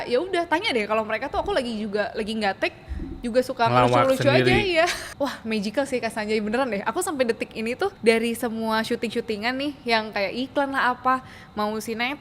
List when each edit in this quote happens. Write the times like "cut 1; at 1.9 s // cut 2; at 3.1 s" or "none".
cut 1; at 5.0 s // cut 2; at 8.0 s